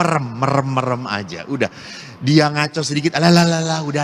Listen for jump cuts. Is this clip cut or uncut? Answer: uncut